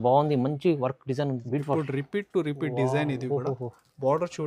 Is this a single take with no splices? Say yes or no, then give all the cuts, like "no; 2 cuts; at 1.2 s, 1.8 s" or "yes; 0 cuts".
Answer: no; 1 cut; at 1.4 s